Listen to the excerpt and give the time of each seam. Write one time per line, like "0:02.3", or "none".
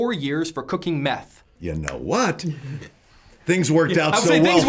0:01.4